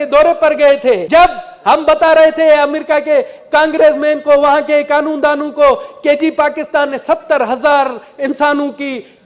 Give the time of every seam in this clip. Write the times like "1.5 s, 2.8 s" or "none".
1.0 s